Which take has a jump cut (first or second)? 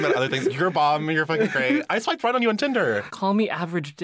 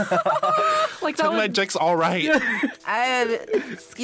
first